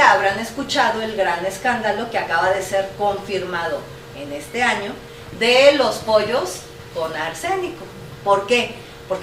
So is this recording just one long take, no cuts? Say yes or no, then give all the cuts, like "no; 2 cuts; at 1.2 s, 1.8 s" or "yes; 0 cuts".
yes; 0 cuts